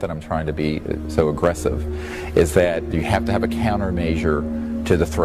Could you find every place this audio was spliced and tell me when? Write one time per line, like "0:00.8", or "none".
0:02.9